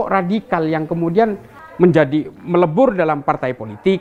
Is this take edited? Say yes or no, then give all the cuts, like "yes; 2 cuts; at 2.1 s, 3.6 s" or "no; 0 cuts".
no; 0 cuts